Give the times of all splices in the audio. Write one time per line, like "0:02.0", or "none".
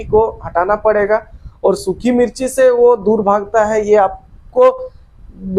none